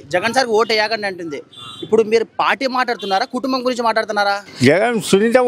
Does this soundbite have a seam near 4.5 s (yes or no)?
yes